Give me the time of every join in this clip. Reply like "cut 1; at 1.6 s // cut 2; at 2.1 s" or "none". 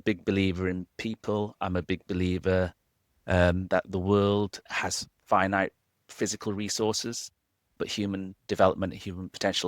cut 1; at 4.6 s // cut 2; at 7.8 s